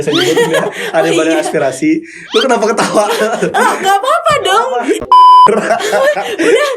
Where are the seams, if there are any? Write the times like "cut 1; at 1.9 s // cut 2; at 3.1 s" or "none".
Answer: cut 1; at 5.5 s